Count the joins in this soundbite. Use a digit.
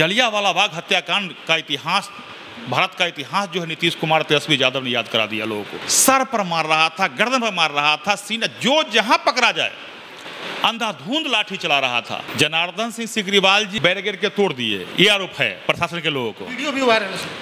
3